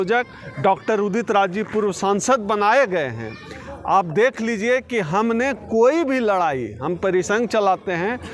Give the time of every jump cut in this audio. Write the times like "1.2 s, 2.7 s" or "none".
none